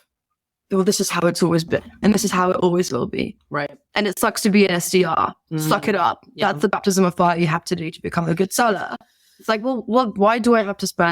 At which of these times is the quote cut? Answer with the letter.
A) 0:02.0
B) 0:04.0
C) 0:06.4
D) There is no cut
A